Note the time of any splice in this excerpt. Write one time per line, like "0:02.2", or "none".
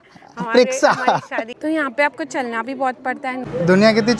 0:01.5
0:03.5